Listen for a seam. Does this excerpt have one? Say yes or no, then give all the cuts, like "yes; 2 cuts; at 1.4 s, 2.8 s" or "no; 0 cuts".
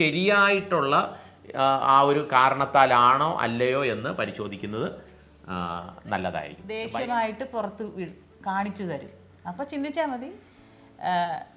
yes; 1 cut; at 6.6 s